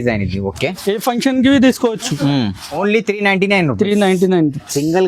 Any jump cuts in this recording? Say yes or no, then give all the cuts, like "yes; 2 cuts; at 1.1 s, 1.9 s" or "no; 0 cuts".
yes; 1 cut; at 2.7 s